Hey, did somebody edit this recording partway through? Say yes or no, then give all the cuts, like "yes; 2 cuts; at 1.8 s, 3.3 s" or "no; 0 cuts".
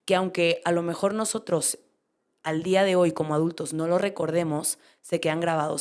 no; 0 cuts